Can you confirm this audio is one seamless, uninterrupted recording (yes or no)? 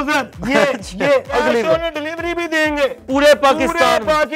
no